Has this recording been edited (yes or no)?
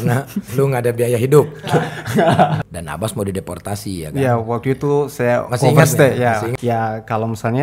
yes